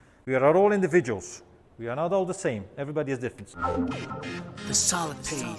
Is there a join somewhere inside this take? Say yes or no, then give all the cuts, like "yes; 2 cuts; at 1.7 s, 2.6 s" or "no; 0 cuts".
yes; 1 cut; at 3.5 s